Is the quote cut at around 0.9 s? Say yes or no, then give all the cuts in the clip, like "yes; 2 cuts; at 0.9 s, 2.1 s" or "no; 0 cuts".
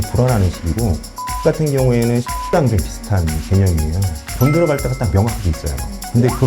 no; 2 cuts; at 2.5 s, 4.3 s